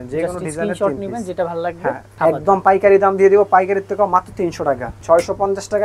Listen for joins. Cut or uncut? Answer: cut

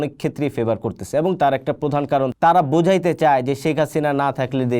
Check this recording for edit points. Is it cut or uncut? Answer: cut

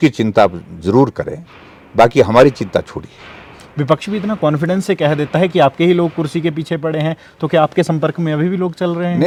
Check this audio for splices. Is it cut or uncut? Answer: uncut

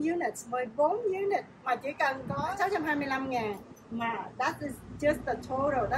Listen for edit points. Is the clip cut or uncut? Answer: uncut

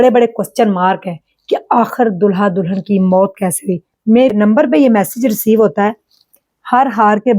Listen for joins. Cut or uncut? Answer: cut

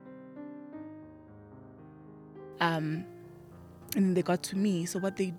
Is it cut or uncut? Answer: uncut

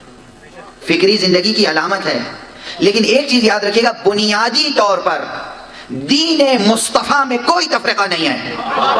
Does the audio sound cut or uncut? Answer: uncut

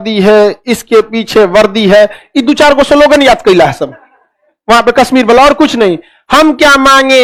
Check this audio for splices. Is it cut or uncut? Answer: uncut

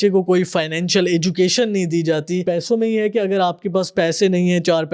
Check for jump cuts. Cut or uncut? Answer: cut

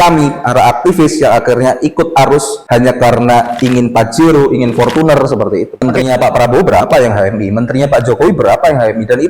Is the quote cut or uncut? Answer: cut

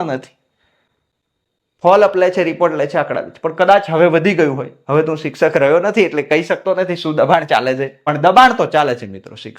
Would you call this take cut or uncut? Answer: cut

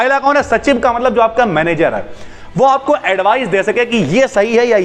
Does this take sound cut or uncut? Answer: uncut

